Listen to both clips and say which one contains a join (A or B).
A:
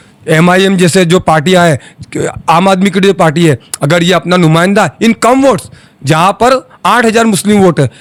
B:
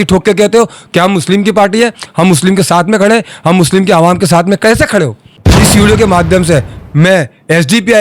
B